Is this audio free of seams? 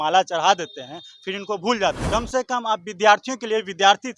no; 1 cut; at 2.0 s

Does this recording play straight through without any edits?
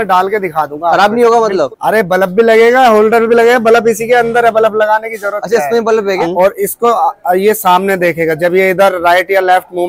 no; 2 cuts; at 1.7 s, 6.2 s

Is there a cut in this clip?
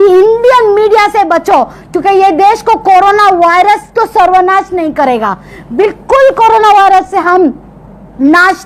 no; 0 cuts

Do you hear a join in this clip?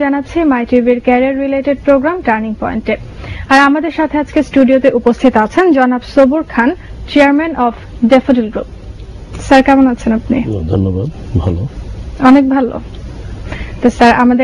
no; 0 cuts

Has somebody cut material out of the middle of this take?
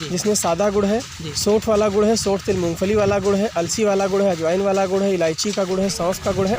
no; 0 cuts

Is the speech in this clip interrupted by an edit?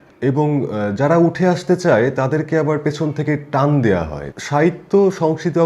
yes; 1 cut; at 4.2 s

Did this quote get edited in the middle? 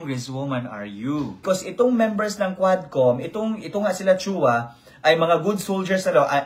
yes; 1 cut; at 1.4 s

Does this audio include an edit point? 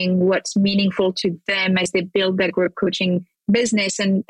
no; 0 cuts

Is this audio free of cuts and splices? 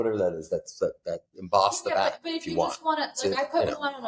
yes; 0 cuts

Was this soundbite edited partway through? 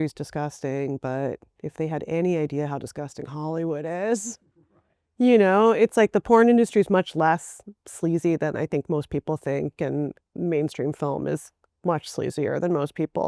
no; 0 cuts

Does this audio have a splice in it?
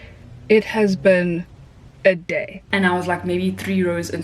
yes; 1 cut; at 2.7 s

